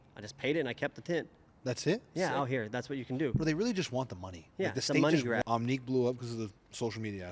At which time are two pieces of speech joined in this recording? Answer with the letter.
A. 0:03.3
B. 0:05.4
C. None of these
B